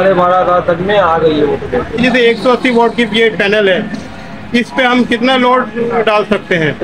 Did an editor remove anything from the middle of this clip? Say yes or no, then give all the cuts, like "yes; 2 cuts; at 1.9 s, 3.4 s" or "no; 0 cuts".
yes; 1 cut; at 2.0 s